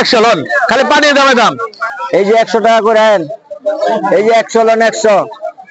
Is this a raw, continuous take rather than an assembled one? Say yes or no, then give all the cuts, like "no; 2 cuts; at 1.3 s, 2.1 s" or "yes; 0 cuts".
no; 1 cut; at 1.9 s